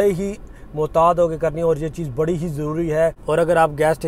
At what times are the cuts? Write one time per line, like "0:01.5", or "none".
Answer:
0:03.2